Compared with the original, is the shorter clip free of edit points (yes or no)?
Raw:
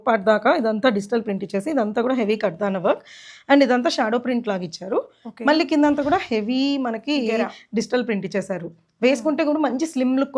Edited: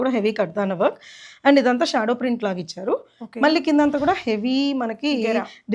yes